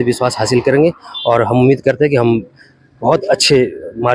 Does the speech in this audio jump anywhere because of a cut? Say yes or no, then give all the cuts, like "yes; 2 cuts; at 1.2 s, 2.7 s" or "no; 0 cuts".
no; 0 cuts